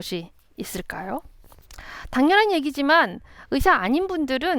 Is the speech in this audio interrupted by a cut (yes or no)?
no